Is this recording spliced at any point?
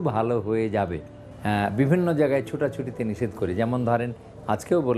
yes; 1 cut; at 1.3 s

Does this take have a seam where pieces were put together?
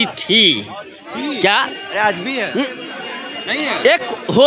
no; 0 cuts

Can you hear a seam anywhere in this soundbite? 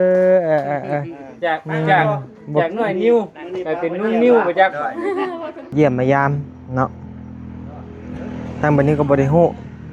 yes; 1 cut; at 5.7 s

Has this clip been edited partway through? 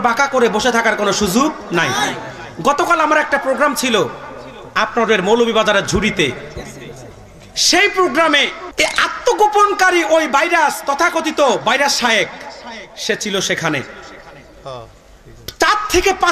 yes; 1 cut; at 8.6 s

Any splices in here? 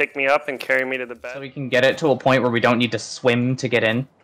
yes; 1 cut; at 1.1 s

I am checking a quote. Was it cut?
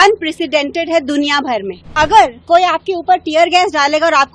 yes; 1 cut; at 1.9 s

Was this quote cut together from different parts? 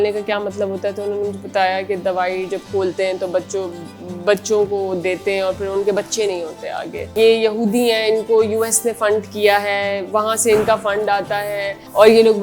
yes; 1 cut; at 7.1 s

